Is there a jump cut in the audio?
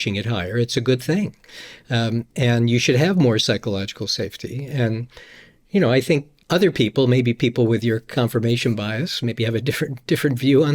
yes; 1 cut; at 6.3 s

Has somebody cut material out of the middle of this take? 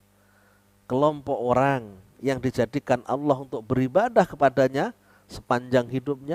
no; 0 cuts

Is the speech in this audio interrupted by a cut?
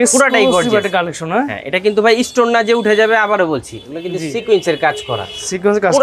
no; 0 cuts

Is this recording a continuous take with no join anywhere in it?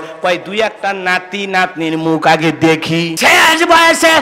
no; 1 cut; at 3.1 s

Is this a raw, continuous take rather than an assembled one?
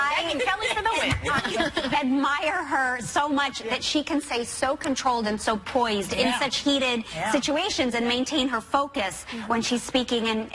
no; 1 cut; at 1.9 s

